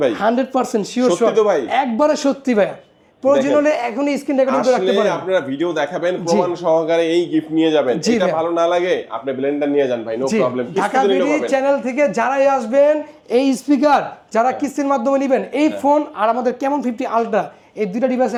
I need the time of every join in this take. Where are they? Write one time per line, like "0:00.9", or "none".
none